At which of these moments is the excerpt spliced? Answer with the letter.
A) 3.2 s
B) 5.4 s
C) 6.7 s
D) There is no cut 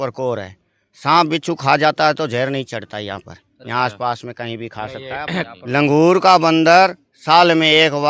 B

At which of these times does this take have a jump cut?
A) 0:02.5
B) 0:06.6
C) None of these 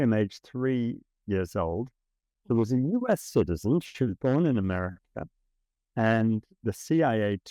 B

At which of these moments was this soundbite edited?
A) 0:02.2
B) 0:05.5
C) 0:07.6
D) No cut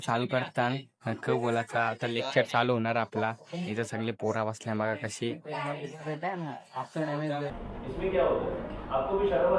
C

